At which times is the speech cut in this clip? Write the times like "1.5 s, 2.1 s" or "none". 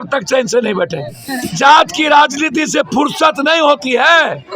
1.1 s